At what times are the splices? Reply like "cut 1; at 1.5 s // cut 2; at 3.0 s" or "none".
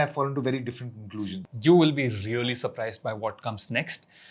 cut 1; at 1.4 s